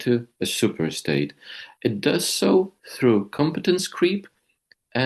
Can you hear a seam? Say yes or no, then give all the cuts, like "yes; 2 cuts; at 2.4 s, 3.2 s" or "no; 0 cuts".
no; 0 cuts